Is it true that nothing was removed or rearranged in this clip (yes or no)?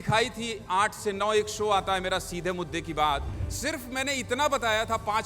no